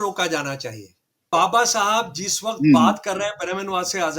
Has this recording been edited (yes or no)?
yes